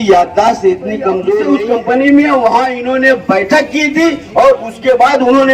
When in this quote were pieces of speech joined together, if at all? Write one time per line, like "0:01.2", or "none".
0:01.4

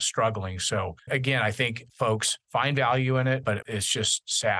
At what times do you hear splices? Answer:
0:01.0
0:01.9
0:03.6

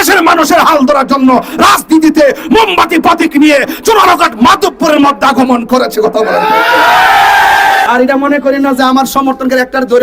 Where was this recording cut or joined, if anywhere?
0:07.8

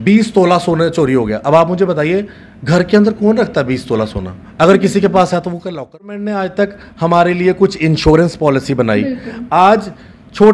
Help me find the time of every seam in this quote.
0:06.1

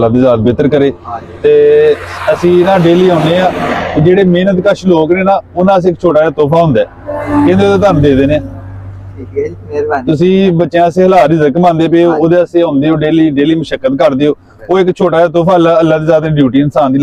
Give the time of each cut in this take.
none

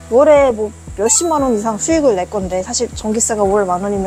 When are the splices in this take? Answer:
none

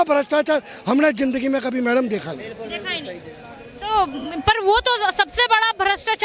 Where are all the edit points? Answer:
none

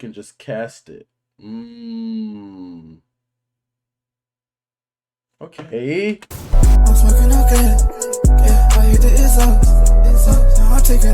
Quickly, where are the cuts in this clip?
0:06.4

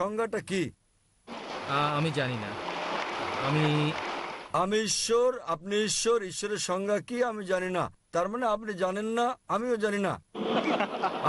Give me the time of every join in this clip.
0:01.3

